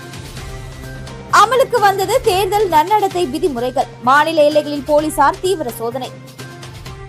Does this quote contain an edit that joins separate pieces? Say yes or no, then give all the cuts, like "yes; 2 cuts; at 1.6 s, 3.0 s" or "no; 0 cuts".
yes; 1 cut; at 1.2 s